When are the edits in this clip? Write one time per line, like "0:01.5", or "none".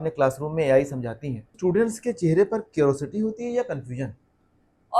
0:01.5